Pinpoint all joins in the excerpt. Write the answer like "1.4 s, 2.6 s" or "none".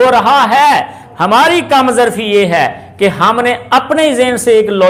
none